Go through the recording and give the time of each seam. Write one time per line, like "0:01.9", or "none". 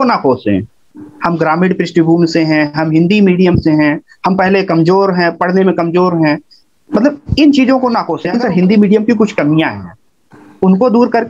0:08.2